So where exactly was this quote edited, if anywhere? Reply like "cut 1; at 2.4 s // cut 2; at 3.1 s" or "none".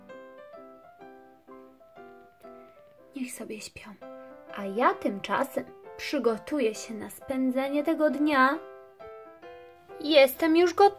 cut 1; at 3.2 s

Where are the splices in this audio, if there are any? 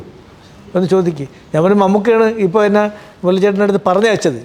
none

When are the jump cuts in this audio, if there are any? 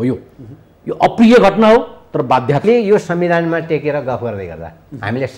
cut 1; at 2.6 s

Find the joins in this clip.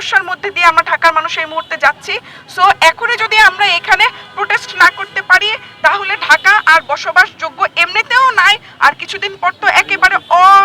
none

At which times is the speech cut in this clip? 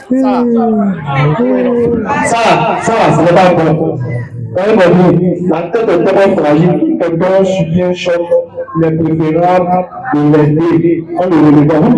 none

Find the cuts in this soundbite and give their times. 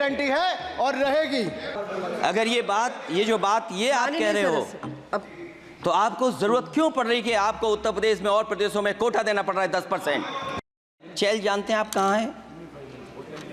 cut 1; at 1.7 s // cut 2; at 11.0 s

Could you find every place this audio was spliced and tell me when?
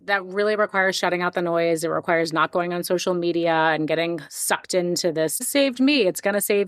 cut 1; at 5.5 s

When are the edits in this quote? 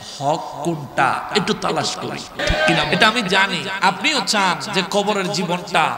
cut 1; at 2.5 s

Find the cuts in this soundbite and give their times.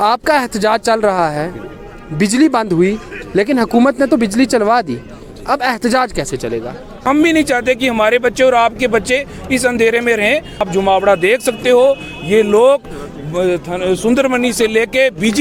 cut 1; at 7.0 s // cut 2; at 10.6 s

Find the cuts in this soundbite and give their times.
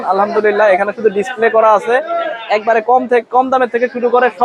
none

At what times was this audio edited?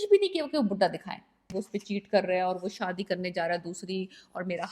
cut 1; at 1.5 s

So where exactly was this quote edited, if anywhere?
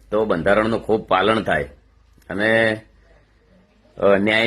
none

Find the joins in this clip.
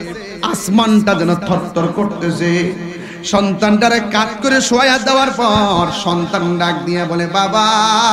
none

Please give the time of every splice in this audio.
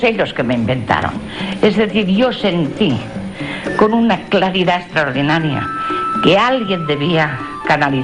cut 1; at 3.8 s

